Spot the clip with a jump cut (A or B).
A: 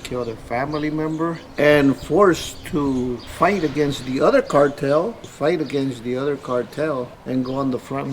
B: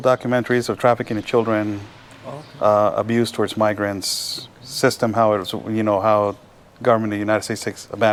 A